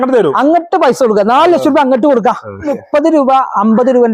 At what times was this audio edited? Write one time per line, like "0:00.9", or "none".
0:02.7